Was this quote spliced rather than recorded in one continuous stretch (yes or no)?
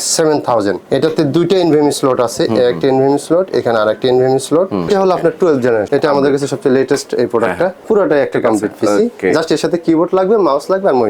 yes